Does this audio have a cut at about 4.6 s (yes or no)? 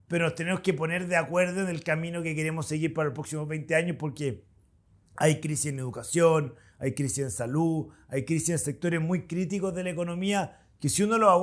no